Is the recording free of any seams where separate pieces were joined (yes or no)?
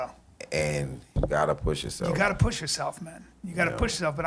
no